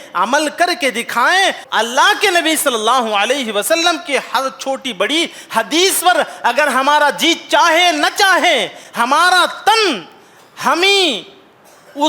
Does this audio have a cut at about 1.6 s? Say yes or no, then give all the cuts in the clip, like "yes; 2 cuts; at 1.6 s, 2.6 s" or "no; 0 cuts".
yes; 1 cut; at 1.6 s